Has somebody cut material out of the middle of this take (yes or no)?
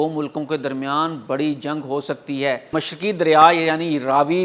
yes